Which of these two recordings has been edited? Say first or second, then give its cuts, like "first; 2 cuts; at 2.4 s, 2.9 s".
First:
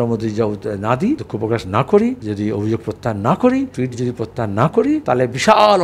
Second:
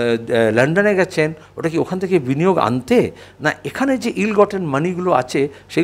first; 4 cuts; at 1.3 s, 2.2 s, 3.7 s, 5.0 s